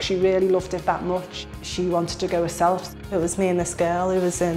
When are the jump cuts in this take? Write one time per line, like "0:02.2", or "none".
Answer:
0:02.9